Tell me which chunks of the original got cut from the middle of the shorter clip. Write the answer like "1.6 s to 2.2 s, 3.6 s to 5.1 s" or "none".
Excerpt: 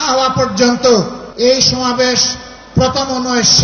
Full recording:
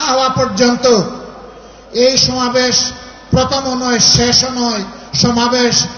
1.2 s to 1.8 s